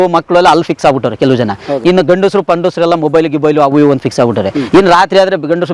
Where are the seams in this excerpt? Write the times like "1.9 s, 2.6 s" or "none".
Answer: none